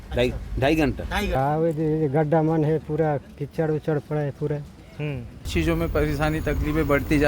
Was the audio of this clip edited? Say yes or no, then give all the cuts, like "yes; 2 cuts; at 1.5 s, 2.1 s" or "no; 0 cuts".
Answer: yes; 2 cuts; at 1.4 s, 5.5 s